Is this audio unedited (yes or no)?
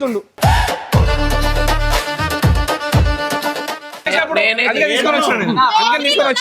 no